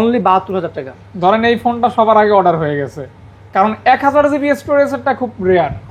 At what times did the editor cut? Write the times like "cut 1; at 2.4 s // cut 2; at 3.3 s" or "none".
none